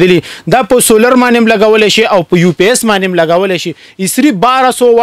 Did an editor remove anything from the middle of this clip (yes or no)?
no